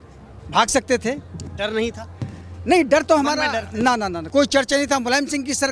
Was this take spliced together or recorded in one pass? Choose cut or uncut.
cut